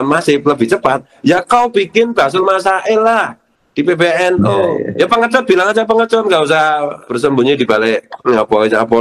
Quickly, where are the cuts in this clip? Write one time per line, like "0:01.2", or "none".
0:04.8
0:07.0
0:08.1